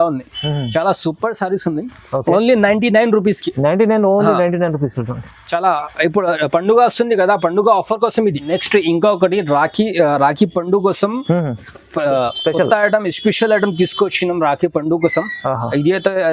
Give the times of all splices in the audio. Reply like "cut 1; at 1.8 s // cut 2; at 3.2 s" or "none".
cut 1; at 8.4 s